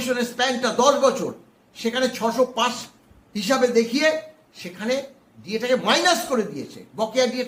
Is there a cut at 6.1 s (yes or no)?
no